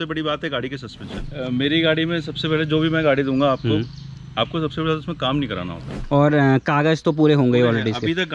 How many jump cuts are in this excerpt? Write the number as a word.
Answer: two